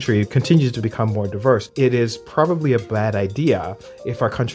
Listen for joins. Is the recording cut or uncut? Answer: uncut